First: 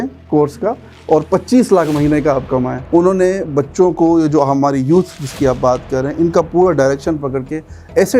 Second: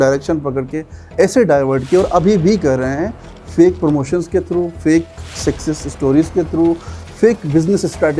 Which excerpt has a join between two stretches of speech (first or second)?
first